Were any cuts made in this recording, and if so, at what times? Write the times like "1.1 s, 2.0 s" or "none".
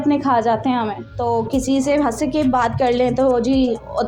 1.0 s